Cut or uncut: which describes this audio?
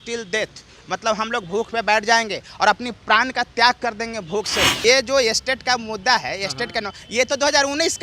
cut